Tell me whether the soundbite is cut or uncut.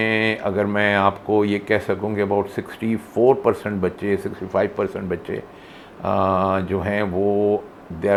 uncut